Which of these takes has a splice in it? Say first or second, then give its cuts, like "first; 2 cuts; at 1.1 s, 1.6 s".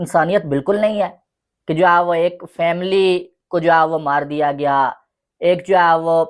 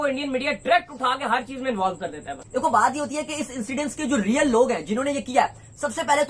second; 1 cut; at 2.3 s